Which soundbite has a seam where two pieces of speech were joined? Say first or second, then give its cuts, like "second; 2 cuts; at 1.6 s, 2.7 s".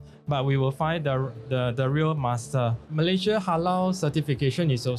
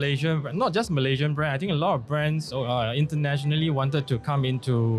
first; 1 cut; at 2.8 s